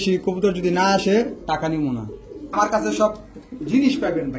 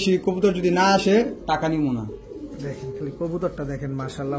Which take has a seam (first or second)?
first